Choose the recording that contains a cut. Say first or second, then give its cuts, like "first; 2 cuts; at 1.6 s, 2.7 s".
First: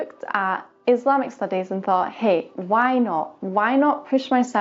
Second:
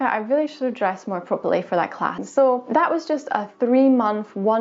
second; 1 cut; at 2.2 s